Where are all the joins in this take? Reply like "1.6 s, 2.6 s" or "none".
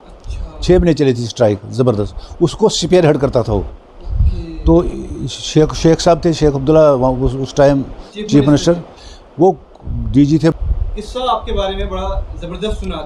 10.6 s